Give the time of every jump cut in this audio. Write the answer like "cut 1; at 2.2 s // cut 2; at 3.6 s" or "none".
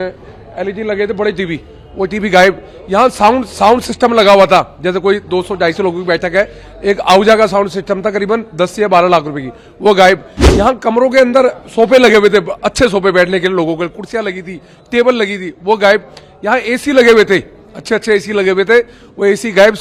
none